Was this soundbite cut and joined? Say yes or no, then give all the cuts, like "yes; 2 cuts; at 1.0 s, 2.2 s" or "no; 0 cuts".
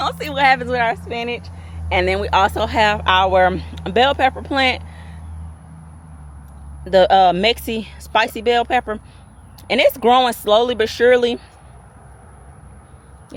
no; 0 cuts